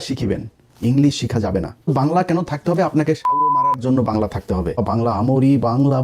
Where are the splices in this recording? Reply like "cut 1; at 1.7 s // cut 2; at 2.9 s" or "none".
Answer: cut 1; at 1.9 s // cut 2; at 4.8 s